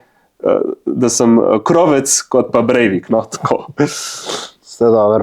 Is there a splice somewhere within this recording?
no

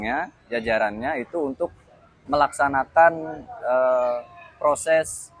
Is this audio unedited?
yes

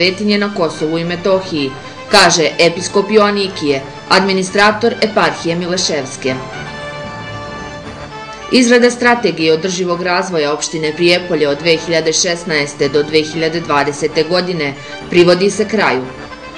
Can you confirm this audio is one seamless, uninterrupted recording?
yes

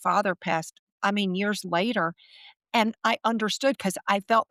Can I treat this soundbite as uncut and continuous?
yes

